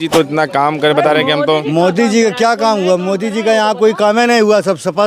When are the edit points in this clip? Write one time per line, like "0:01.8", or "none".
none